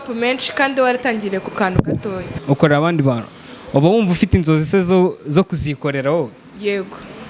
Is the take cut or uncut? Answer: cut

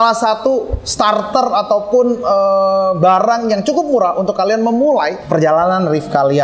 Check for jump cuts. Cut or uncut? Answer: cut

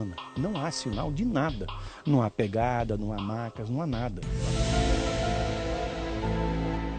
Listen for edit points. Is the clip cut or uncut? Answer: cut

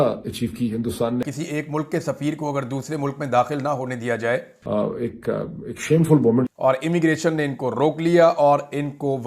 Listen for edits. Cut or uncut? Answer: cut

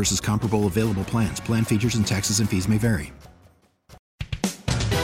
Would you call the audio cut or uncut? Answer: cut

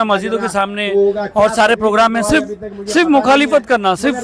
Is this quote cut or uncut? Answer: uncut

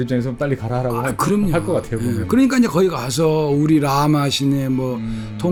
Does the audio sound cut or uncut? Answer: uncut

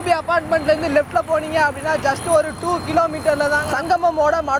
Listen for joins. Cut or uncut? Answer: uncut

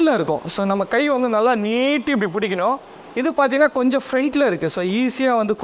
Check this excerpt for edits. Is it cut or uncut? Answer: uncut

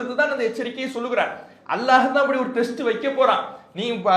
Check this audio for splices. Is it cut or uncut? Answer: uncut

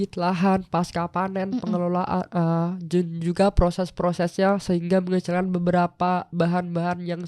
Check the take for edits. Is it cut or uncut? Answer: uncut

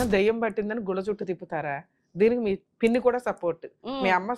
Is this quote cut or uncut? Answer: cut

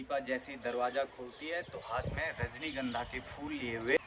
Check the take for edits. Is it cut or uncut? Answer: uncut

